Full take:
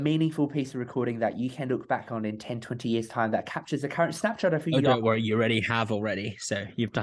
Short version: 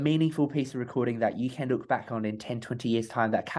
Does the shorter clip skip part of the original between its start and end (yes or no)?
no